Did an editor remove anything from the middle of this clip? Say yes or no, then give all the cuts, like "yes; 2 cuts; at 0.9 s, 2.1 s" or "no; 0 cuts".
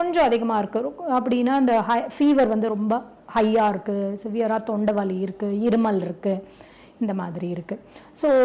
no; 0 cuts